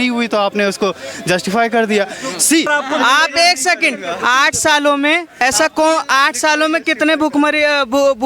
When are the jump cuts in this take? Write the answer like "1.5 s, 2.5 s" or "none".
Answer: 2.7 s